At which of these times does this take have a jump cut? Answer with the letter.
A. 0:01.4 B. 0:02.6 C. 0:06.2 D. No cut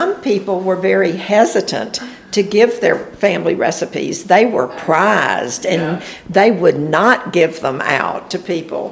D